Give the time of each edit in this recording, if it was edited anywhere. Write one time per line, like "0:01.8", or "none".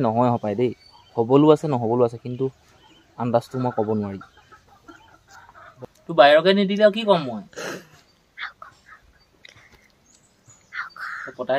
0:05.7

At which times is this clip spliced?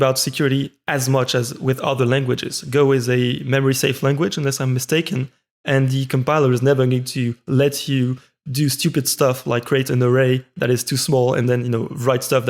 none

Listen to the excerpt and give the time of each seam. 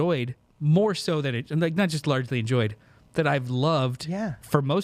none

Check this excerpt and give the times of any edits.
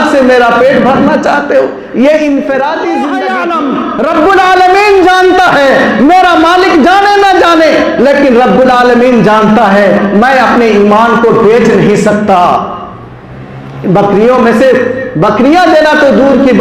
0:03.3

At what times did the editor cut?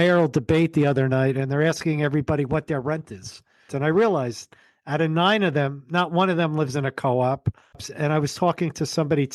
0:03.7
0:07.9

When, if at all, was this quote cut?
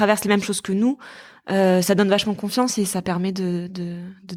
none

